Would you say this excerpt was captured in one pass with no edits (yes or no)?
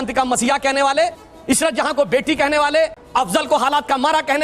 no